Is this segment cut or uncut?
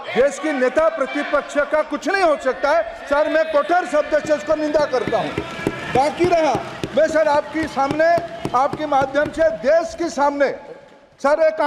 uncut